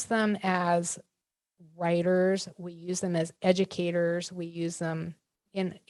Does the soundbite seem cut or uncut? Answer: uncut